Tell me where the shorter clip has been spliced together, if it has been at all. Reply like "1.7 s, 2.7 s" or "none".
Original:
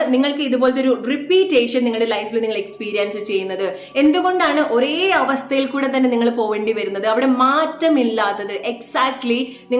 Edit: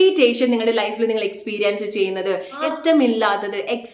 2.6 s